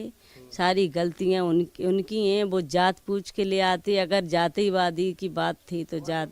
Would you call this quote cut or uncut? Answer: uncut